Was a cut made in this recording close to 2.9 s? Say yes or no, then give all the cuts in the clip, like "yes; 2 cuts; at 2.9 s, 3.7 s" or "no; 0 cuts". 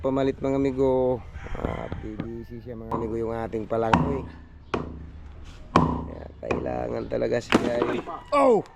yes; 1 cut; at 2.9 s